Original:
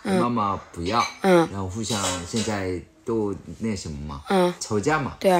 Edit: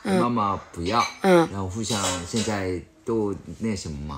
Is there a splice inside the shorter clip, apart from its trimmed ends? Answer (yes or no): no